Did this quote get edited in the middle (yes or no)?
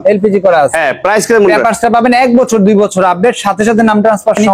no